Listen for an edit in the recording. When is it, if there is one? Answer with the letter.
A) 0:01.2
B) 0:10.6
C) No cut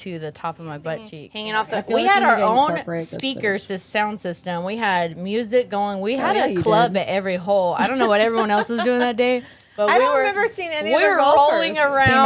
A